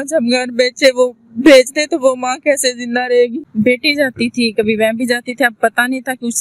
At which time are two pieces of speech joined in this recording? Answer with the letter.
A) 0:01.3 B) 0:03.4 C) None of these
B